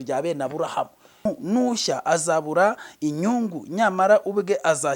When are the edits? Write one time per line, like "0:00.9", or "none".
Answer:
0:01.2